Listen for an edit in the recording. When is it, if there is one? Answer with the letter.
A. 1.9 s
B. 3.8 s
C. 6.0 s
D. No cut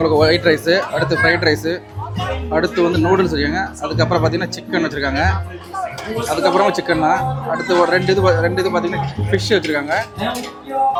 D